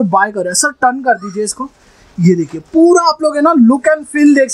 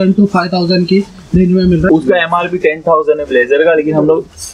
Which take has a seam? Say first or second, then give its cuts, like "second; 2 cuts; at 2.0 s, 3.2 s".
second; 1 cut; at 1.9 s